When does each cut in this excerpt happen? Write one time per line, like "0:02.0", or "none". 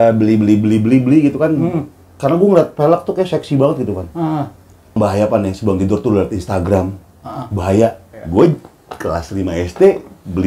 0:05.0
0:08.1

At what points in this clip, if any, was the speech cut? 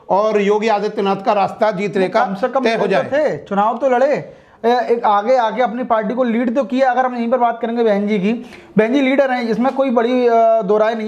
none

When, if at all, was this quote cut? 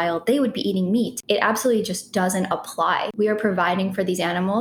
0:01.2
0:03.1

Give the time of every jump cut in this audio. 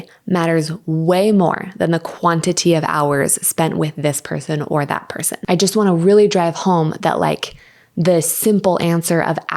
0:05.4

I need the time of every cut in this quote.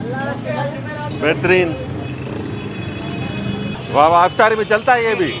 0:01.1
0:03.8

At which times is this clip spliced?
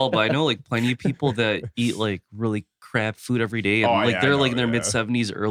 none

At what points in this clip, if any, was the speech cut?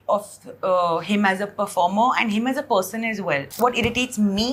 0:03.5

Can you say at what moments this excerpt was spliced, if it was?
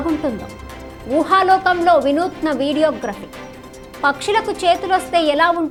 none

